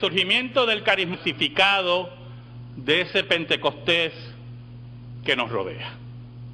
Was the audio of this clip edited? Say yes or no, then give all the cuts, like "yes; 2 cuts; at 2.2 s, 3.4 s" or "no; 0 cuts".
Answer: no; 0 cuts